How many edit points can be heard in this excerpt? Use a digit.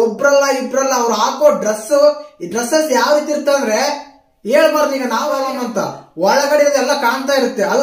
1